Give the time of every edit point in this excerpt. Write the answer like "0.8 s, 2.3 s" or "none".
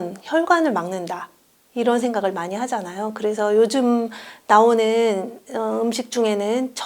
none